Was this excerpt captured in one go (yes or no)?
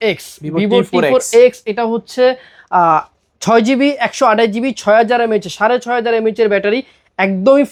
yes